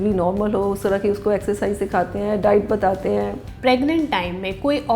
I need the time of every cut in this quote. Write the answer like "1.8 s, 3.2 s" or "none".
3.4 s